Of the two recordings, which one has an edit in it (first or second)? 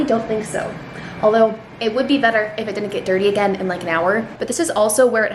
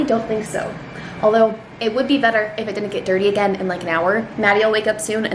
first